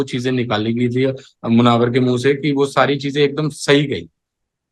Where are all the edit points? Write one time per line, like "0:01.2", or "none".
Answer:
none